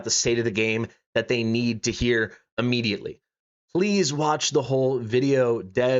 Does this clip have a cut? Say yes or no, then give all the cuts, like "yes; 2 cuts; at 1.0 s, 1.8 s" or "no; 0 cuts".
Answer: yes; 1 cut; at 3.4 s